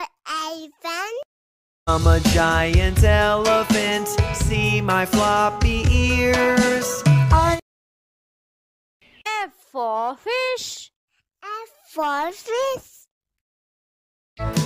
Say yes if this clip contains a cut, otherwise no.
no